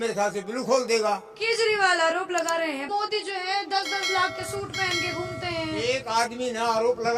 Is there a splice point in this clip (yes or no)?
yes